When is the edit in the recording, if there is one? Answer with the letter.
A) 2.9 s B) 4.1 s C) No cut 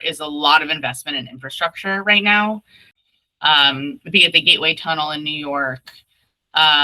A